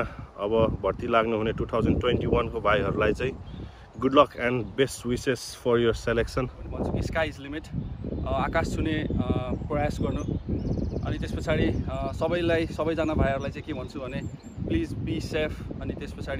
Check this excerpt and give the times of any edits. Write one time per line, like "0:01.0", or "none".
0:06.8